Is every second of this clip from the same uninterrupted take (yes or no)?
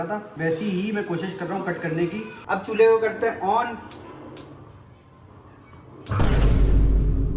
no